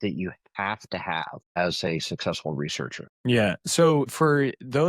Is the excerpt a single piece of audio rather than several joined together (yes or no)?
no